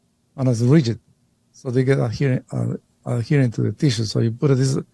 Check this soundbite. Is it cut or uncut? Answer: uncut